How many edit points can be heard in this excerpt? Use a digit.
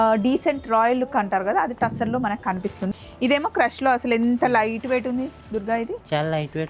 1